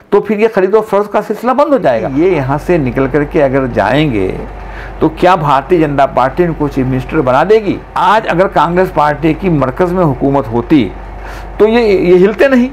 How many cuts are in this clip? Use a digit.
2